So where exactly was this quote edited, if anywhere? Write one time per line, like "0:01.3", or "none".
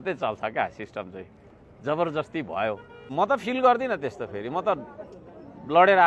0:03.1